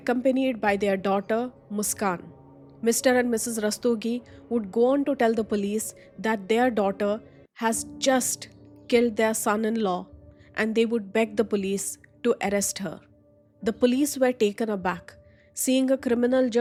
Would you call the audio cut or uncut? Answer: uncut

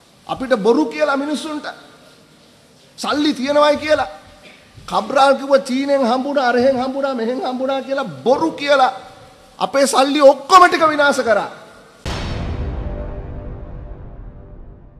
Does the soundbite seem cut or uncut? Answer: cut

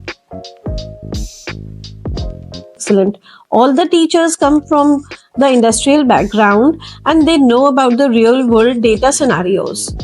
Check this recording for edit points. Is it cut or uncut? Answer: cut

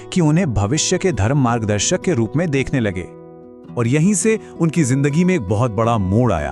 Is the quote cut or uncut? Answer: uncut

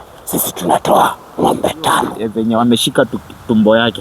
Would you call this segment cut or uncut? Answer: cut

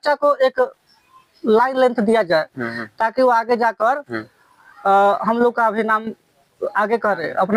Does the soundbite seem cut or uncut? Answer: uncut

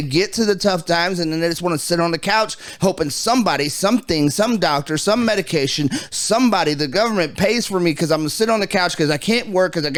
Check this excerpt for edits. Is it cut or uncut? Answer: uncut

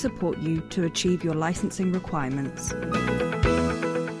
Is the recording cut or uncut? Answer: cut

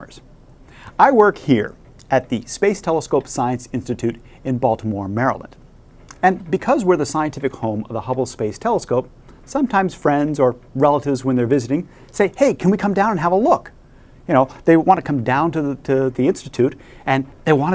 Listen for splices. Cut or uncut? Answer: uncut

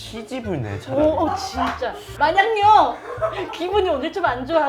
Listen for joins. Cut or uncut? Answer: cut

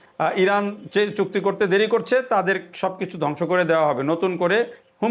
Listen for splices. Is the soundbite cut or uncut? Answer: uncut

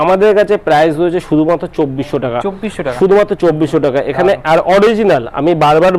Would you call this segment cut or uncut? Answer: uncut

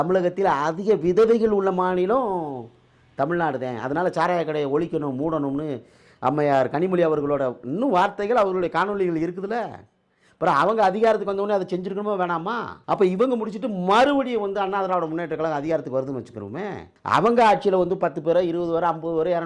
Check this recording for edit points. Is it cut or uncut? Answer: uncut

